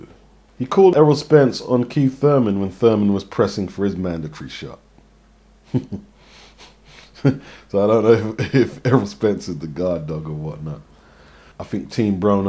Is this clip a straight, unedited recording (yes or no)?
yes